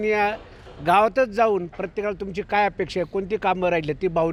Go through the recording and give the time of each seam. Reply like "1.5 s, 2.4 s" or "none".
none